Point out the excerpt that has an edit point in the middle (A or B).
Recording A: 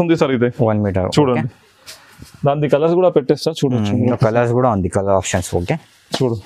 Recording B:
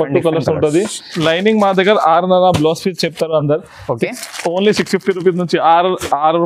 B